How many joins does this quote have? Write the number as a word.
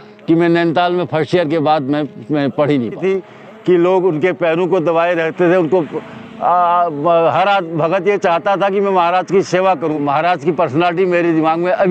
two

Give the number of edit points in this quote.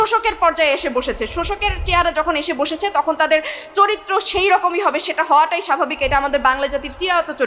zero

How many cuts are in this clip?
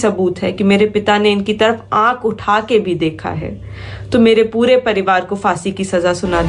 zero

